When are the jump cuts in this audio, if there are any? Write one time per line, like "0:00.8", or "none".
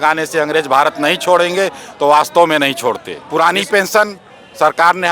0:03.1